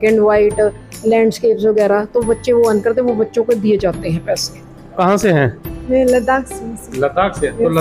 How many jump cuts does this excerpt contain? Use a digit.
1